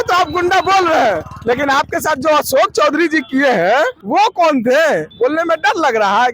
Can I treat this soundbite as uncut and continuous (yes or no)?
no